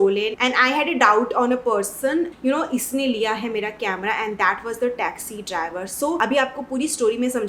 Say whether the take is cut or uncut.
uncut